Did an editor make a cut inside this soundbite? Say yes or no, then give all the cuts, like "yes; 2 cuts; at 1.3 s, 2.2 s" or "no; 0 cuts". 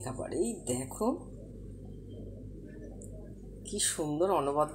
no; 0 cuts